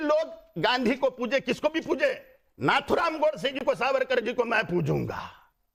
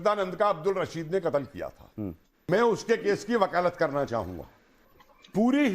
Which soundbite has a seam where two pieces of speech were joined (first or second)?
second